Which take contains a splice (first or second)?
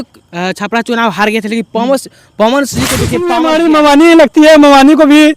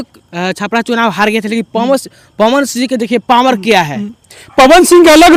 first